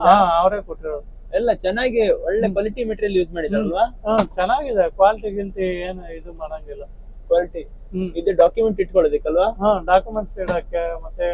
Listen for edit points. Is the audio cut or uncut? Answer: uncut